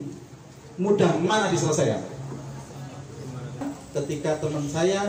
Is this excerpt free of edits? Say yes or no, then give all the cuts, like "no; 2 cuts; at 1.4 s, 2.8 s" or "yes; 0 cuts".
no; 1 cut; at 3.6 s